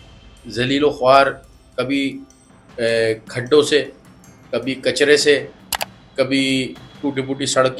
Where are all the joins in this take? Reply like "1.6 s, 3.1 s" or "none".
none